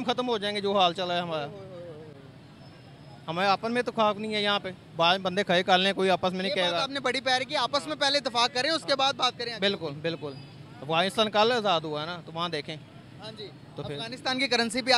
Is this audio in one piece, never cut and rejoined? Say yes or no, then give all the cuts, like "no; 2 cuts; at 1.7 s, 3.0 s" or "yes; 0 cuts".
yes; 0 cuts